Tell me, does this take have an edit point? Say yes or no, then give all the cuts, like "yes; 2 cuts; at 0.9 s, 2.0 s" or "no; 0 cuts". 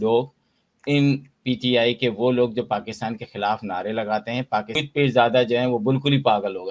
yes; 1 cut; at 4.8 s